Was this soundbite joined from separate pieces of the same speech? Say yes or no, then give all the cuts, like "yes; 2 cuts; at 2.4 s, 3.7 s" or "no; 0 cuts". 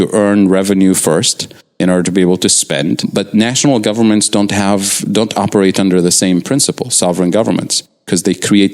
yes; 1 cut; at 3.1 s